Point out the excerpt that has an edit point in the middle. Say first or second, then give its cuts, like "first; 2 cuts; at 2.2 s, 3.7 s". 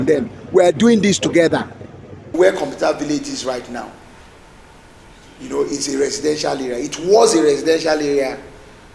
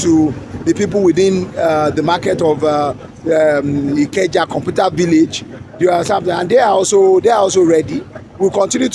first; 1 cut; at 2.3 s